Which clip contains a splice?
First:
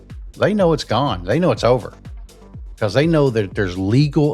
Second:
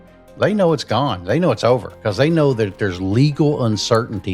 second; 1 cut; at 1.9 s

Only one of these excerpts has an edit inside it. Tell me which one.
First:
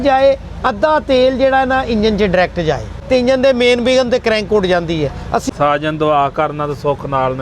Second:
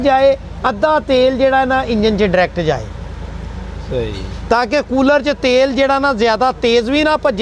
first; 2 cuts; at 3.0 s, 5.4 s

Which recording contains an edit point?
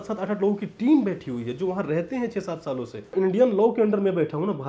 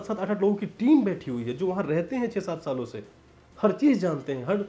first; 1 cut; at 3.1 s

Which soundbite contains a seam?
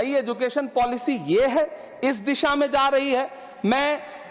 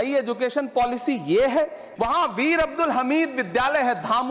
second; 1 cut; at 1.8 s

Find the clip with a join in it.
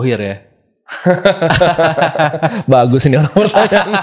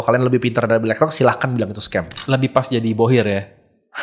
second; 1 cut; at 2.2 s

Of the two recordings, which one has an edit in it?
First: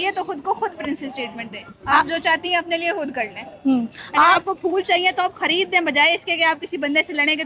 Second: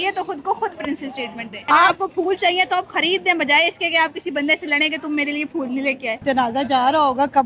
second; 2 cuts; at 1.5 s, 6.2 s

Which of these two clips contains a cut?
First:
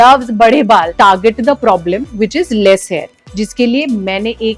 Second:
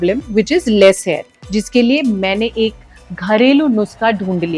first; 1 cut; at 0.9 s

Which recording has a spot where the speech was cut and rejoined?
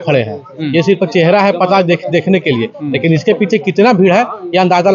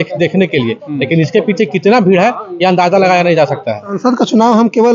second; 1 cut; at 3.9 s

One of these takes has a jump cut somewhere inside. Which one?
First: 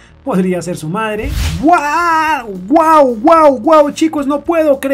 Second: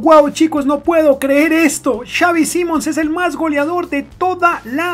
first; 1 cut; at 1.4 s

